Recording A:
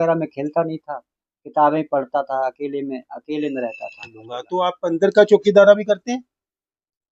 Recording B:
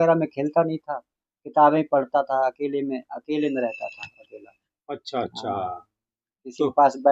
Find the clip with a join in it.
A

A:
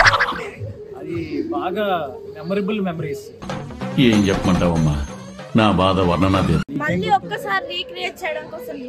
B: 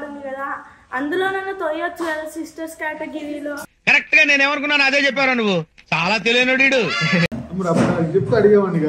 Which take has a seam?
A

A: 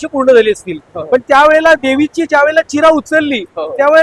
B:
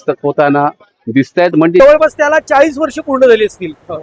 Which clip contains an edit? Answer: B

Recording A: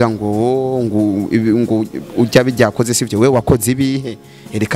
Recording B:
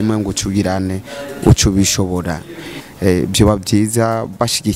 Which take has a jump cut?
B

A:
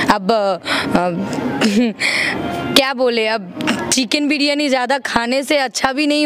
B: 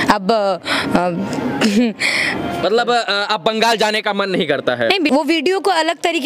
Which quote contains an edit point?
B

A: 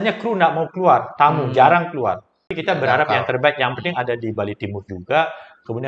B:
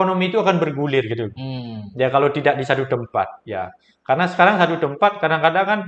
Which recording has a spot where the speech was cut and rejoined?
A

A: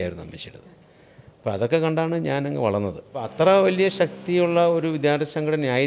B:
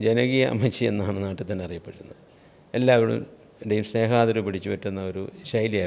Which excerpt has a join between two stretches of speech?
A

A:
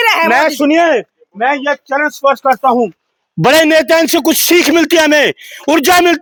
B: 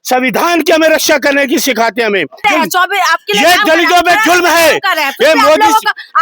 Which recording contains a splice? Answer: B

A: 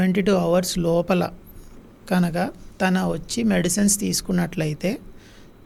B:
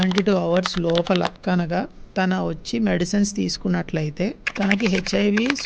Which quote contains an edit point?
B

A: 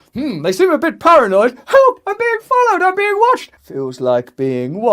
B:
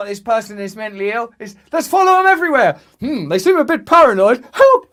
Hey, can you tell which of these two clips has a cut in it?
A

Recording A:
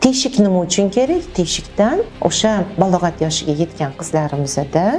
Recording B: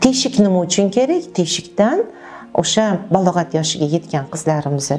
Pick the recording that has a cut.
A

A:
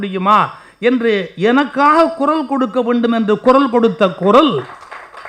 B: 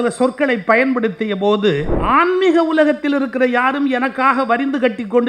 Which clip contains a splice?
B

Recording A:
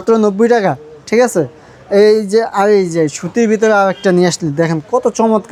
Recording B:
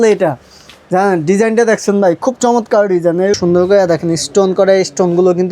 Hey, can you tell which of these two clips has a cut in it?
B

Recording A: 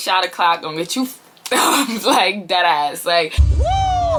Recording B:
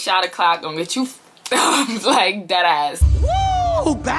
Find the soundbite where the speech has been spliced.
B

